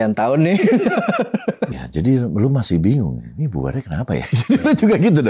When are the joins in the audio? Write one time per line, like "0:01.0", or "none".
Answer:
0:01.7